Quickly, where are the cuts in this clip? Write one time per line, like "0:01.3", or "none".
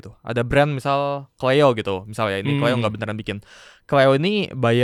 none